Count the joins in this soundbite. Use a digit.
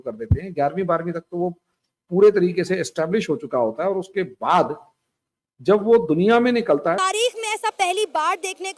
1